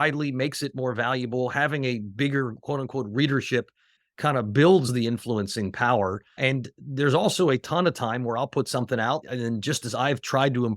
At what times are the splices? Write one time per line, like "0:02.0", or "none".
0:04.0
0:04.9
0:06.4
0:09.2